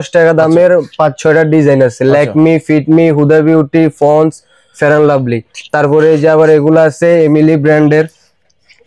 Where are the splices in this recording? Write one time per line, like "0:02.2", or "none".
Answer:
none